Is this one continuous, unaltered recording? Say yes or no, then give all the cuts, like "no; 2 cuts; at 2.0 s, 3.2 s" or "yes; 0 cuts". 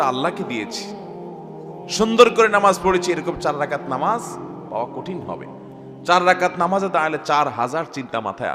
yes; 0 cuts